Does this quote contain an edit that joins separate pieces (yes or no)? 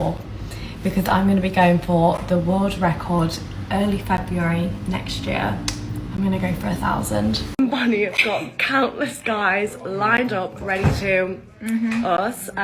yes